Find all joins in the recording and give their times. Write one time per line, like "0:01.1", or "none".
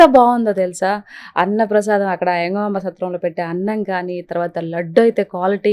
none